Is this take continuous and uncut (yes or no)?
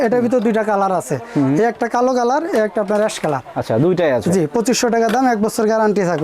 yes